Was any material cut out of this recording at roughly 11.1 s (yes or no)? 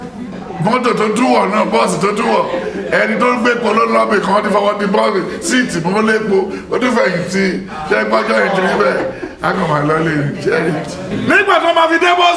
yes